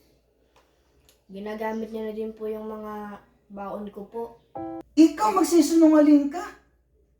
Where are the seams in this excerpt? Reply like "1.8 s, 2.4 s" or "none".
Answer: 4.8 s